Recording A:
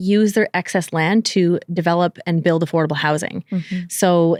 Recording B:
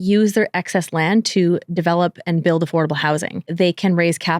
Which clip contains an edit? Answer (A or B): B